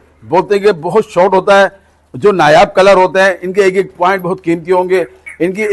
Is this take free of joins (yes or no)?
yes